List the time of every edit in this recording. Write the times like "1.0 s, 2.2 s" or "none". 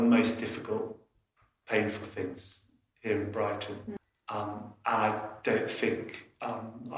4.0 s